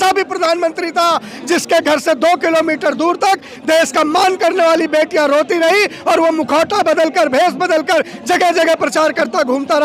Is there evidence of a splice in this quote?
no; 0 cuts

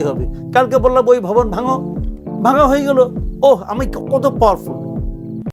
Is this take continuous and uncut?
yes; 0 cuts

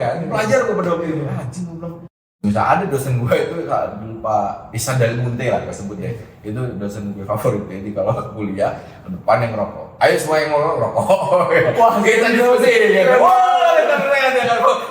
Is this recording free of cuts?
no; 1 cut; at 2.3 s

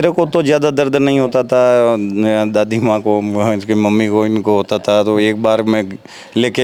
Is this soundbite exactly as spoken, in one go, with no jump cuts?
yes; 0 cuts

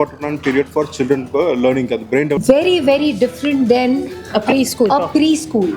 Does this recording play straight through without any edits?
no; 1 cut; at 2.4 s

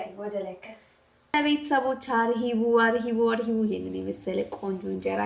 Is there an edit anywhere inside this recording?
yes; 1 cut; at 1.3 s

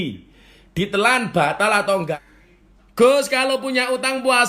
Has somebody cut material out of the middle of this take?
yes; 1 cut; at 2.2 s

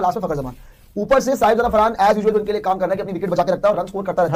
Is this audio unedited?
yes; 0 cuts

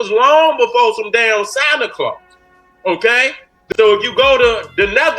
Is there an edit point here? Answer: yes; 1 cut; at 3.5 s

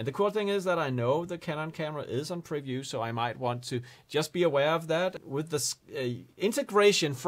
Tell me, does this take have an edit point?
yes; 1 cut; at 5.2 s

